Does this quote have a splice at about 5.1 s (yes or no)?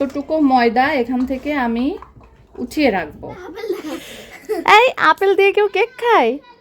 no